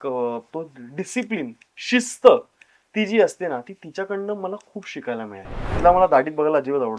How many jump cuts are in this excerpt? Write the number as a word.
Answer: one